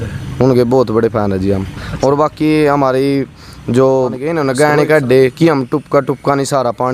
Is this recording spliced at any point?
yes; 1 cut; at 4.3 s

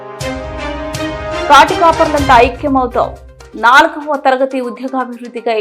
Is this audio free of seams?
no; 1 cut; at 1.5 s

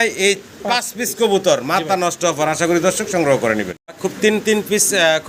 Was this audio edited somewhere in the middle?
no; 0 cuts

